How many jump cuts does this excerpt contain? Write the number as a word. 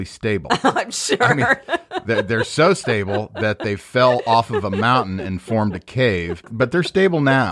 one